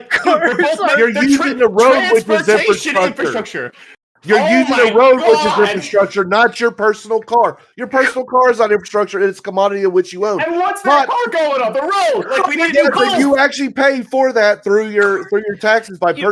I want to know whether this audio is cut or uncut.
uncut